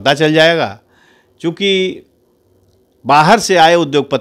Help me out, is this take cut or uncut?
uncut